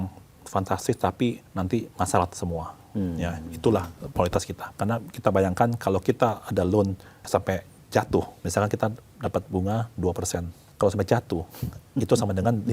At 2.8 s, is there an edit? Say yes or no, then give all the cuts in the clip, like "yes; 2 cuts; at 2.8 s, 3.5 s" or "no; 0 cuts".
no; 5 cuts; at 1.5 s, 4.6 s, 7.1 s, 8.4 s, 10.6 s